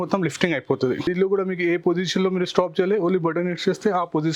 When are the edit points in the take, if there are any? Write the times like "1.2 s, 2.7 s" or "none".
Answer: 1.1 s